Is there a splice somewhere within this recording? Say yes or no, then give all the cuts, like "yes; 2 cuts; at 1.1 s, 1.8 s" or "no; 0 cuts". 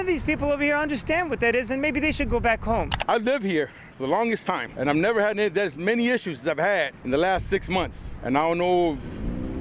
yes; 4 cuts; at 2.9 s, 4.7 s, 7.0 s, 8.1 s